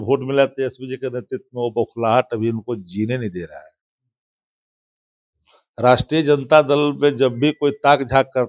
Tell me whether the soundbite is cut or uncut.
uncut